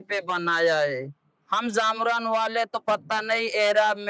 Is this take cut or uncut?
uncut